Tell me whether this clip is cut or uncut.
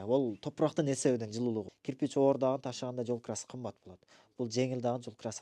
cut